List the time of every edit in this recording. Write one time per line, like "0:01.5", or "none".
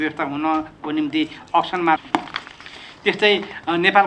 none